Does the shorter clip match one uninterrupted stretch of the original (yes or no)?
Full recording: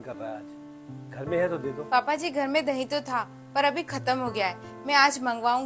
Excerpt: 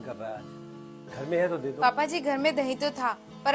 no